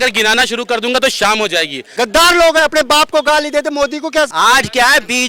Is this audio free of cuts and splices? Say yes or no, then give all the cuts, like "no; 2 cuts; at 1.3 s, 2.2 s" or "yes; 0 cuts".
no; 2 cuts; at 1.9 s, 4.3 s